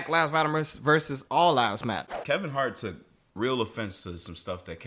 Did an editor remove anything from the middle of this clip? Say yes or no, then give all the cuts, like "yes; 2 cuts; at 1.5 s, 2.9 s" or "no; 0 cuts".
yes; 2 cuts; at 1.2 s, 2.1 s